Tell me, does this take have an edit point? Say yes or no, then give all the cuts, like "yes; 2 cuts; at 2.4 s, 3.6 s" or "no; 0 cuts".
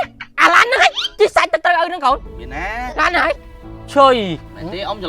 yes; 1 cut; at 3.4 s